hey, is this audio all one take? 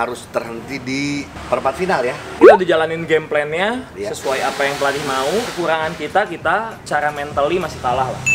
yes; 0 cuts

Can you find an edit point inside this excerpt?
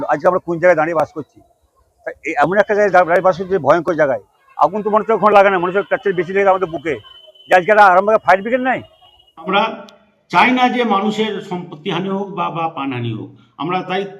yes; 1 cut; at 9.5 s

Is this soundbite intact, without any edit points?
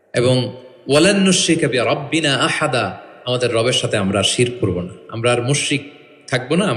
yes; 0 cuts

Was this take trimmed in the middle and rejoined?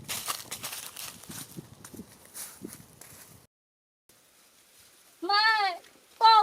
yes; 1 cut; at 3.5 s

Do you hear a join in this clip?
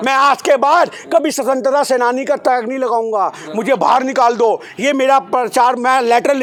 no; 0 cuts

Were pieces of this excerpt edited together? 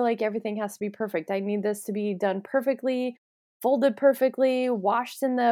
no; 0 cuts

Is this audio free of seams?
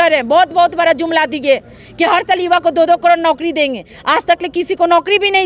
yes; 0 cuts

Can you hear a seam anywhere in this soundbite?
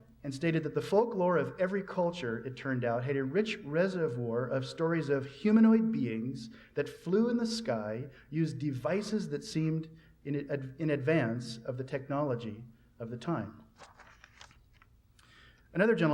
yes; 1 cut; at 1.5 s

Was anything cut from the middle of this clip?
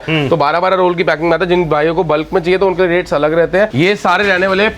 yes; 1 cut; at 3.7 s

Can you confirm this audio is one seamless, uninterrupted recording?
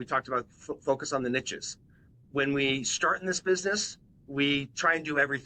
no; 1 cut; at 2.3 s

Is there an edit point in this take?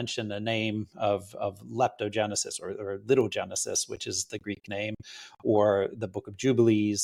no; 0 cuts

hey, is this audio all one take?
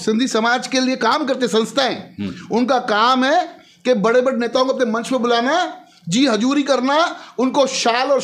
yes; 0 cuts

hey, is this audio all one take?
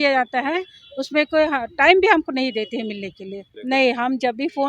no; 1 cut; at 3.5 s

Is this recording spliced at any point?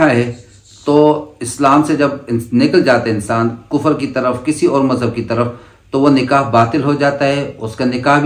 no; 0 cuts

